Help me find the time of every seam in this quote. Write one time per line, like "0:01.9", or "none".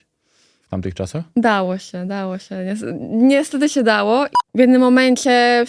0:04.3